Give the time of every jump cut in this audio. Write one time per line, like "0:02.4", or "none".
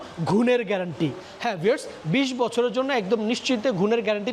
none